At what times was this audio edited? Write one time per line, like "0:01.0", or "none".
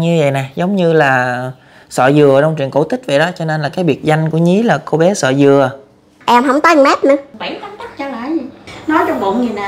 0:06.1
0:07.3
0:08.7